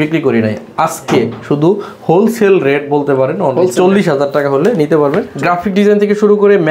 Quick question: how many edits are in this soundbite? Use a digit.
1